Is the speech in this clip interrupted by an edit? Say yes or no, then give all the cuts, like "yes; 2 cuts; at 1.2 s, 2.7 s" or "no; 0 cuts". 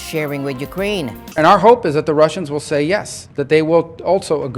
yes; 1 cut; at 1.2 s